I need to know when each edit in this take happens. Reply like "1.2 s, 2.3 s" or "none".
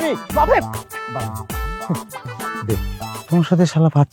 3.2 s